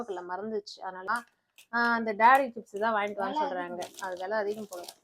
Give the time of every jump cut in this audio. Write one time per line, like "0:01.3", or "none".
0:01.1